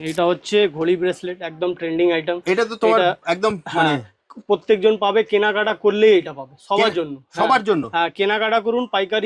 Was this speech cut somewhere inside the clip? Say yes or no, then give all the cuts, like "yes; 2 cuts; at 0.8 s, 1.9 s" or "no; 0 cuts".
no; 0 cuts